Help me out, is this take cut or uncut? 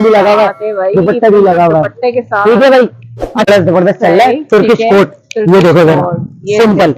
cut